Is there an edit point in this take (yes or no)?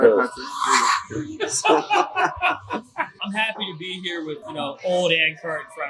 yes